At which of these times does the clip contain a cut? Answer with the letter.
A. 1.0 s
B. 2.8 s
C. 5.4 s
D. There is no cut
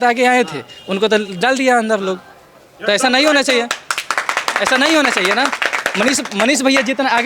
D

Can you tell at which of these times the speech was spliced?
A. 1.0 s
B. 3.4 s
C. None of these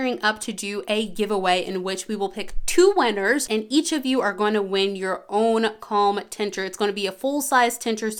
C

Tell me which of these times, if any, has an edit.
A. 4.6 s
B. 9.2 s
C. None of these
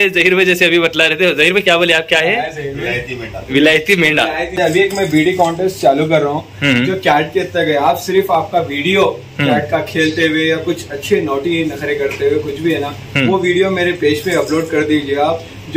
A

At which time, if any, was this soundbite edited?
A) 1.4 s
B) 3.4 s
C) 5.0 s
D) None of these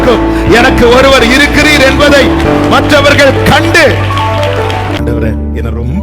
C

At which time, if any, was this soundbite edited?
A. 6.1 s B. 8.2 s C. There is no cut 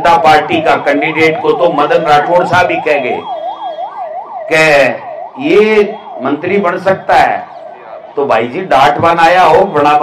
C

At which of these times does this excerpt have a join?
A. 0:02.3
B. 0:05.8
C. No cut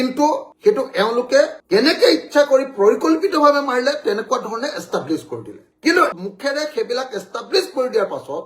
C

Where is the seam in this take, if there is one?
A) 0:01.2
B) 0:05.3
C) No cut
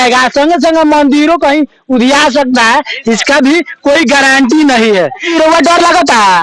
B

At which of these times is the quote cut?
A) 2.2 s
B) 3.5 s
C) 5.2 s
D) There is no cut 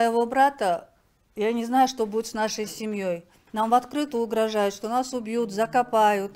D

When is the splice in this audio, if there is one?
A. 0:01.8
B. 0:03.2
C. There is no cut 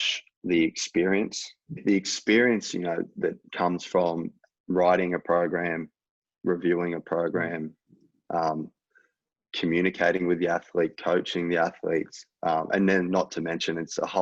A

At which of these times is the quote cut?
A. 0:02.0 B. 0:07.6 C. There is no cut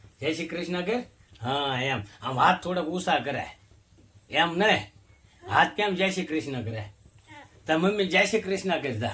C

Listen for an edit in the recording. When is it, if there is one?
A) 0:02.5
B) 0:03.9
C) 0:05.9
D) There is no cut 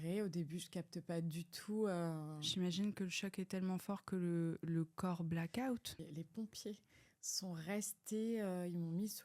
C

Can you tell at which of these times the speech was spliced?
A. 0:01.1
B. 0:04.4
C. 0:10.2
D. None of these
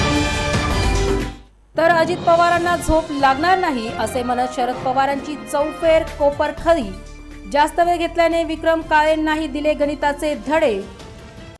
A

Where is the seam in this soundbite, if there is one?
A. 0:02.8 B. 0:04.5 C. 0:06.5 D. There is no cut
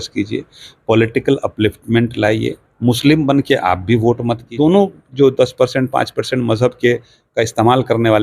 B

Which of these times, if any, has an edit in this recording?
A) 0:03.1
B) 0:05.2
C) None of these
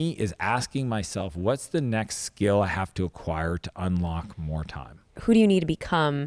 B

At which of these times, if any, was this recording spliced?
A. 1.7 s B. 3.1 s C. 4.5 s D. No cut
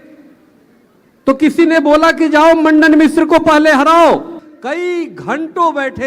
C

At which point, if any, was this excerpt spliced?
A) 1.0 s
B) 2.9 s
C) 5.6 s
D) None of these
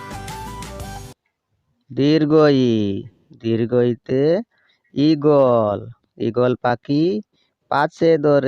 A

